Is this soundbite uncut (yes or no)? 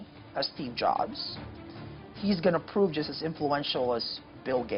yes